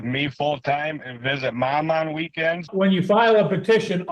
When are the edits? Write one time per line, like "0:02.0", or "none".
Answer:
0:02.7